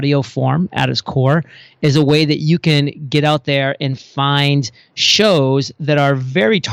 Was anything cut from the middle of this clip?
no; 0 cuts

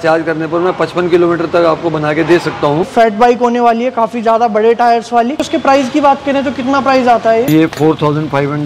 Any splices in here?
yes; 3 cuts; at 2.9 s, 5.3 s, 7.5 s

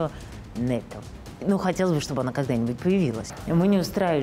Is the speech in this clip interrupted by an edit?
yes; 2 cuts; at 1.2 s, 3.2 s

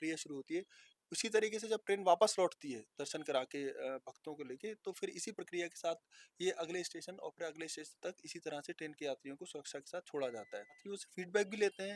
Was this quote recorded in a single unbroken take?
no; 1 cut; at 10.8 s

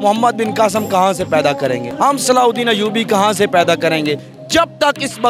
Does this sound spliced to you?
yes; 2 cuts; at 1.9 s, 4.3 s

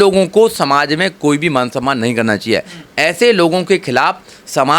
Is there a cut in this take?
no; 0 cuts

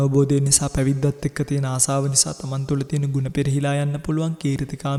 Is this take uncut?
yes; 0 cuts

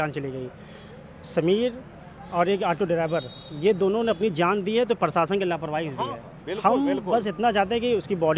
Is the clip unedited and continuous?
yes; 0 cuts

